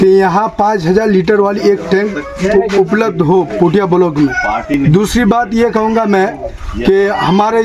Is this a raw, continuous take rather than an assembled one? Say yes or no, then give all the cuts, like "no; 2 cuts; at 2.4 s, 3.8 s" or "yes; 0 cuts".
yes; 0 cuts